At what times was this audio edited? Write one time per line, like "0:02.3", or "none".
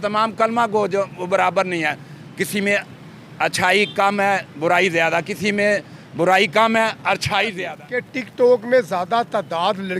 0:07.5